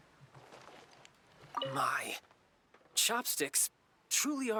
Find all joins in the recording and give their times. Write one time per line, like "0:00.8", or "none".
none